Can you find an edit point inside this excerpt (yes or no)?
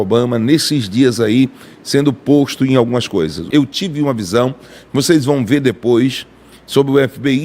yes